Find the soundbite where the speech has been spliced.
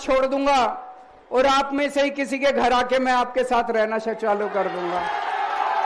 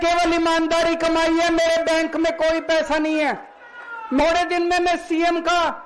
second; 1 cut; at 4.2 s

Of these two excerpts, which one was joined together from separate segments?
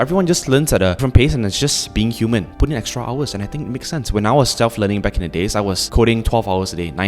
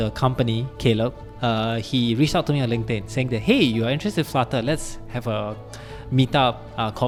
first; 3 cuts; at 1.0 s, 2.5 s, 5.8 s

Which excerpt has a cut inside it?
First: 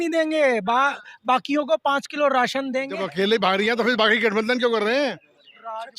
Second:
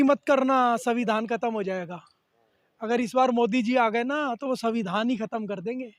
first; 1 cut; at 2.9 s

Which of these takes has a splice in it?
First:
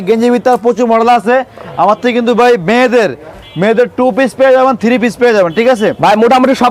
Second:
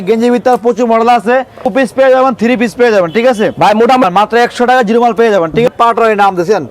second; 3 cuts; at 1.7 s, 4.0 s, 5.7 s

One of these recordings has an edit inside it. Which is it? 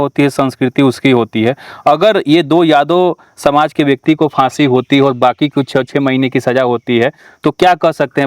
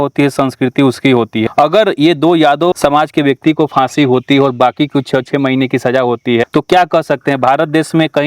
second; 3 cuts; at 1.5 s, 2.7 s, 6.5 s

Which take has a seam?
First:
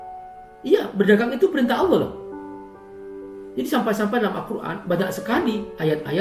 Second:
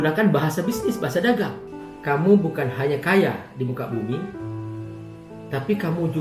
second; 1 cut; at 1.6 s

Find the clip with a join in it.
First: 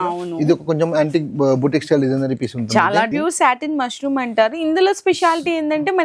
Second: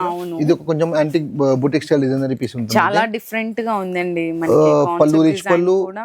first; 1 cut; at 3.1 s

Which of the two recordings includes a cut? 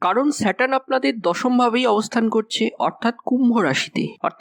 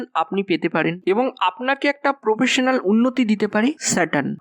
second; 1 cut; at 1.0 s

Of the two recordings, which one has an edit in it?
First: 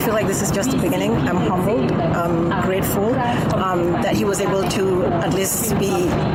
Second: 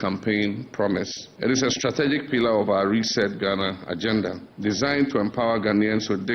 second; 2 cuts; at 1.2 s, 4.5 s

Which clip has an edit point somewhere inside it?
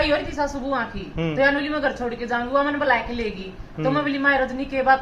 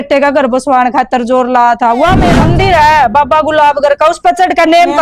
second; 1 cut; at 2.2 s

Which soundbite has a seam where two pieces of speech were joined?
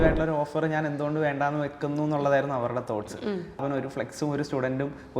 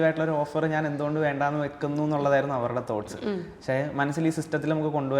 first; 1 cut; at 3.6 s

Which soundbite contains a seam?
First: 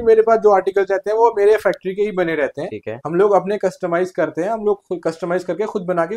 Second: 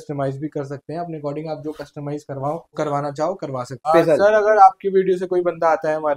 second; 2 cuts; at 2.7 s, 3.8 s

